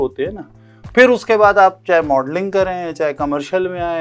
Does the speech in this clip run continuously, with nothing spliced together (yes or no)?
yes